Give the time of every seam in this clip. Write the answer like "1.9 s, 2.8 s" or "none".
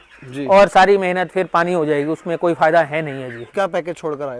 3.5 s